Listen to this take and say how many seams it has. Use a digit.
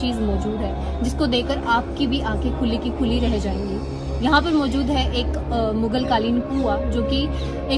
0